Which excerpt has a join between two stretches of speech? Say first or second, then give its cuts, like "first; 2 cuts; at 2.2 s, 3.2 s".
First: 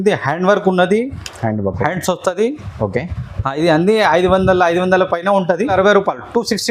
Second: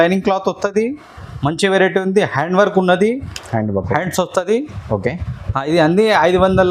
first; 1 cut; at 5.7 s